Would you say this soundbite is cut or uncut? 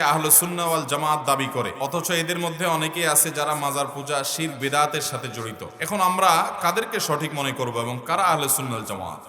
cut